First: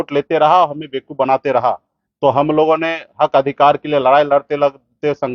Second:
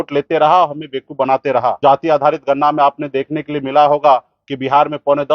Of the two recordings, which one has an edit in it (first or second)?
second